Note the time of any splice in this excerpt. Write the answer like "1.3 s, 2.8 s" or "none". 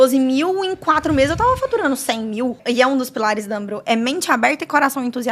2.6 s